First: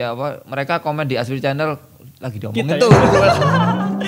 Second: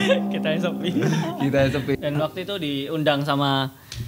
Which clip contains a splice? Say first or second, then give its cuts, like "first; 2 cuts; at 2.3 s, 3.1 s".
second; 1 cut; at 2.0 s